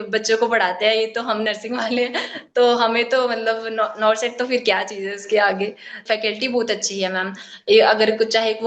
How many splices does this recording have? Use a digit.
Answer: 1